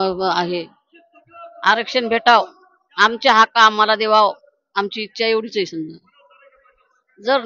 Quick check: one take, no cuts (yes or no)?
yes